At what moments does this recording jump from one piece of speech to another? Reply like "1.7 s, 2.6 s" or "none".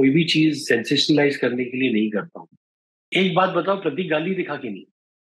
3.1 s